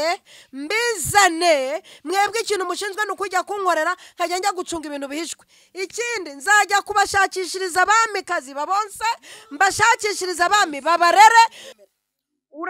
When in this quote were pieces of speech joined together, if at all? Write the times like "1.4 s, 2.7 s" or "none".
11.7 s